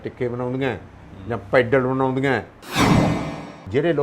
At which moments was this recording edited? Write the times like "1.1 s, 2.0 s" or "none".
3.1 s